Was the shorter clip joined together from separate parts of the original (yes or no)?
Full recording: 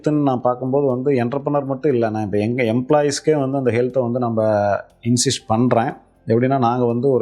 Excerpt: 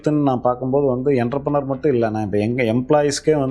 no